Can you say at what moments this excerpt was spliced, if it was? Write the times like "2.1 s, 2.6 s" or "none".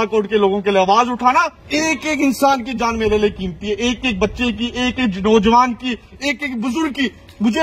1.6 s